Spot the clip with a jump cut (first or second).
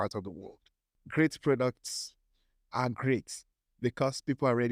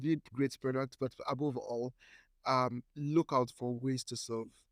first